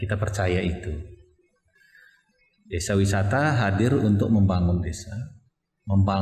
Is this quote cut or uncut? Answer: uncut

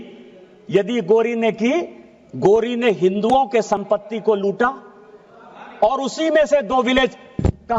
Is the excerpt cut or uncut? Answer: uncut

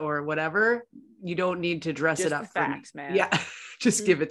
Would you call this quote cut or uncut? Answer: uncut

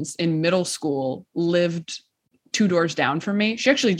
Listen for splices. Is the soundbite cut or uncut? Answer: uncut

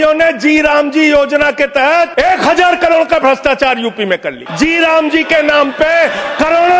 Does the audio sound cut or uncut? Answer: cut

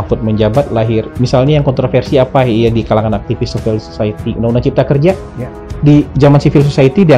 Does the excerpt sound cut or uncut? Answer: cut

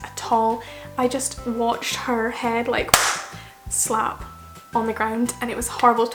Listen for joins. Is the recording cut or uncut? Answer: uncut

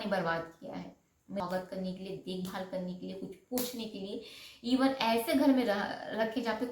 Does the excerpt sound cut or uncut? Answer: cut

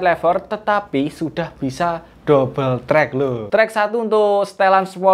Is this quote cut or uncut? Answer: cut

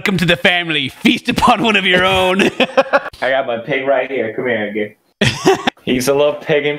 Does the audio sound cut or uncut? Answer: cut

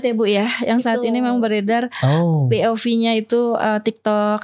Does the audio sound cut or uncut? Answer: uncut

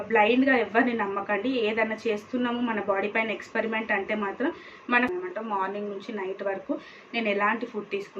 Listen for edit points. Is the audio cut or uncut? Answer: cut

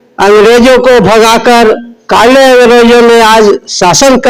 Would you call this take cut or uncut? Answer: uncut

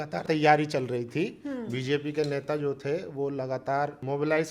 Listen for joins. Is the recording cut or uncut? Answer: uncut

